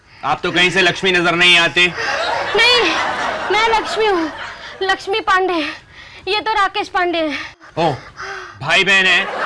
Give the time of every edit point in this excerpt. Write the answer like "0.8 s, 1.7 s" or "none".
7.5 s